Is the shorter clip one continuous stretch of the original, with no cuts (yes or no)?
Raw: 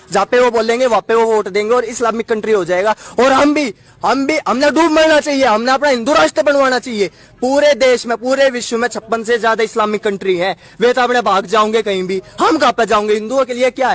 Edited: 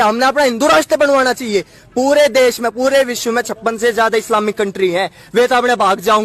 yes